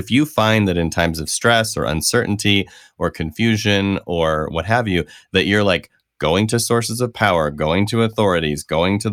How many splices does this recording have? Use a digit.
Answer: 0